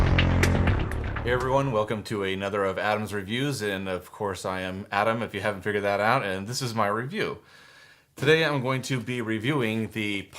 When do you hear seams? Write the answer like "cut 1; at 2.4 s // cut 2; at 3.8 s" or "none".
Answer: cut 1; at 1.1 s